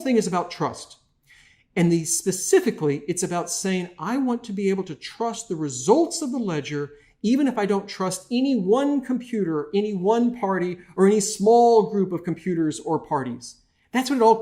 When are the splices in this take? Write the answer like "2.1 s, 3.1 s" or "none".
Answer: none